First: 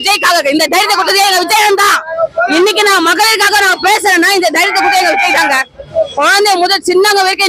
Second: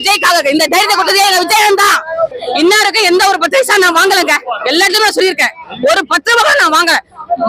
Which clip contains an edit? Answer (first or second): second